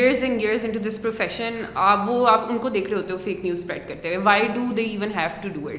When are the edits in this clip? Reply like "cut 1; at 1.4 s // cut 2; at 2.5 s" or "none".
none